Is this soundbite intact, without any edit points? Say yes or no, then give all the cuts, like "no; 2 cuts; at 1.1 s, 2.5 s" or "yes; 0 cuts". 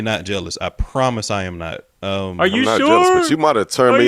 yes; 0 cuts